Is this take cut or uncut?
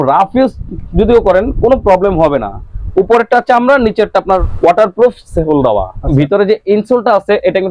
cut